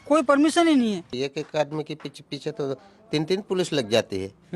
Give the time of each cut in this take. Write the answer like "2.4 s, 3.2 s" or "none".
1.1 s